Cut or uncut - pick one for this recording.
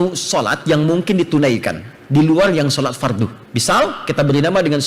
cut